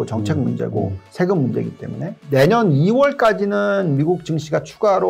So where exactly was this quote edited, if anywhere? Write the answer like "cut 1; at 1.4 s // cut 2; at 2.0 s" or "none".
cut 1; at 2.1 s